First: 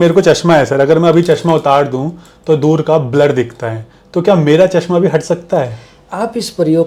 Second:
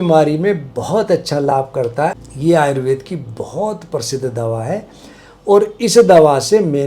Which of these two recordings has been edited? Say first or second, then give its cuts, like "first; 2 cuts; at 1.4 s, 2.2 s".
second; 1 cut; at 2.3 s